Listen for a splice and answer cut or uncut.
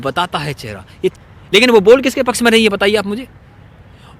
cut